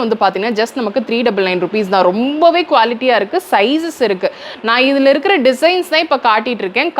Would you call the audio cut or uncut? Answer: uncut